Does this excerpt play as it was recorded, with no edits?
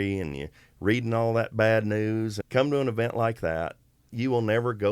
no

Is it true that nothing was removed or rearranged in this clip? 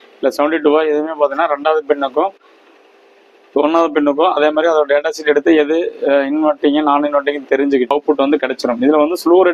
no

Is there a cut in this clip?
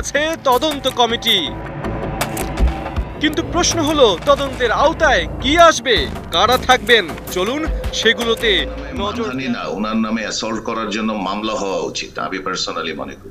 yes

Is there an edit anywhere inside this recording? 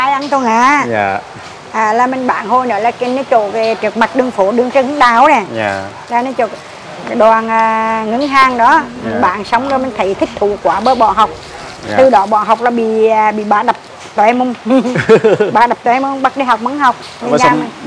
no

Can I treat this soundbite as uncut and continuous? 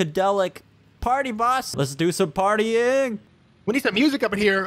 no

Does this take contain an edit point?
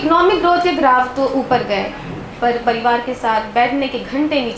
no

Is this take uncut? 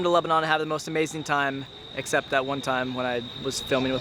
yes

